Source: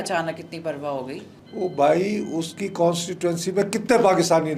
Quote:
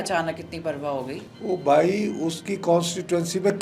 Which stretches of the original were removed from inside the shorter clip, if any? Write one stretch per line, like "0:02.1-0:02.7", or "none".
0:01.3-0:01.4